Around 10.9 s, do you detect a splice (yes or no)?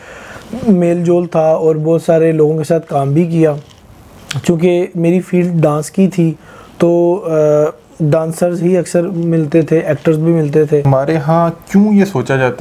yes